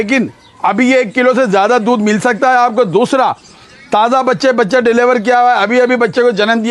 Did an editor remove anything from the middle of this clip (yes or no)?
no